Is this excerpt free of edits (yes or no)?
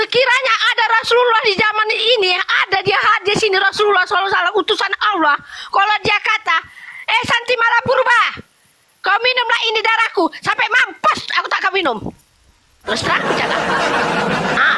yes